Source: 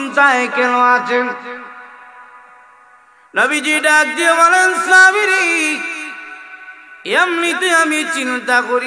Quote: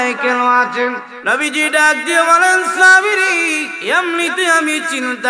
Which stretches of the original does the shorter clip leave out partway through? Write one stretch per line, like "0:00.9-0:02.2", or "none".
0:01.4-0:03.2
0:05.8-0:07.0